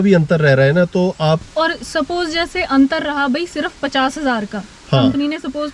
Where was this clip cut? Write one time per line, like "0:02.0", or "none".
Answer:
0:01.5